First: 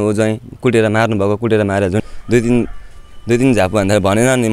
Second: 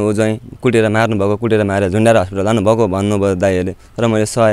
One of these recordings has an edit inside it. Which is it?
first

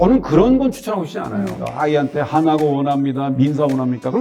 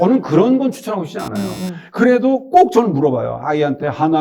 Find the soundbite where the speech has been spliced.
first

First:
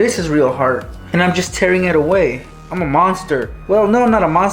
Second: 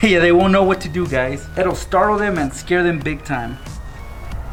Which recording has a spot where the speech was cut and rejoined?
first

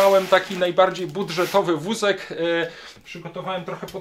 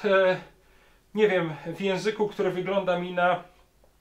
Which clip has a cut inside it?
first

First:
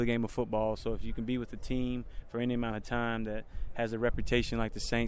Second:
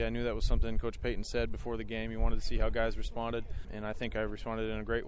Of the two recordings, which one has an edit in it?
second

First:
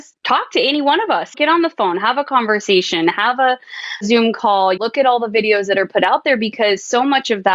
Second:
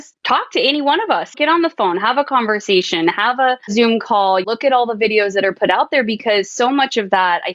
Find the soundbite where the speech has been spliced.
second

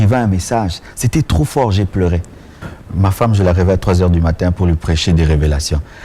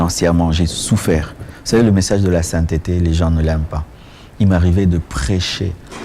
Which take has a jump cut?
first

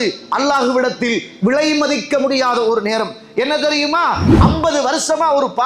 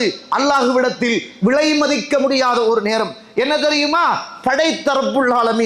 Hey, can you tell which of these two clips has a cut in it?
first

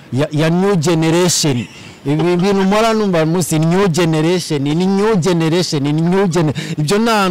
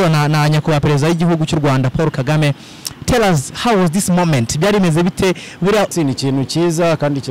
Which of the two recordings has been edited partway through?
second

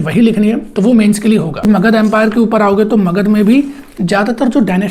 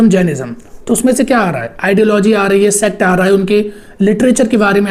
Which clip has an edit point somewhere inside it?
first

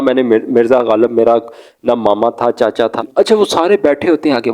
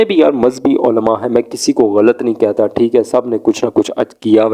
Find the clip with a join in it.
first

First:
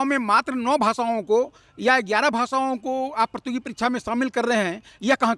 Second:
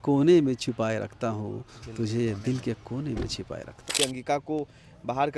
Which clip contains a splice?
second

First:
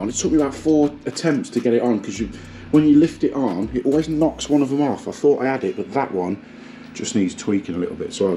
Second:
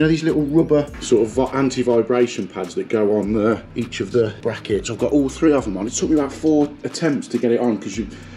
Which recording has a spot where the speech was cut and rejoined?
second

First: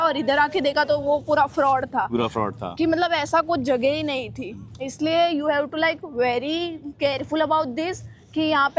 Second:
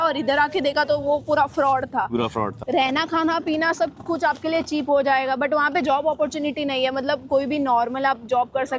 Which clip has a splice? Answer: second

